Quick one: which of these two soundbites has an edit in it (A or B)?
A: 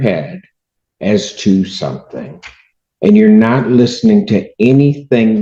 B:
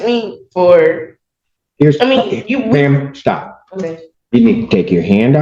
B